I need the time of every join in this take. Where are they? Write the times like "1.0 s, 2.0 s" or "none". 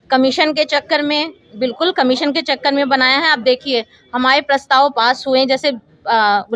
none